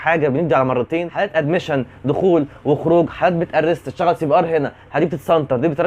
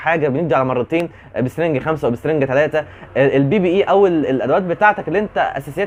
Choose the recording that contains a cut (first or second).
first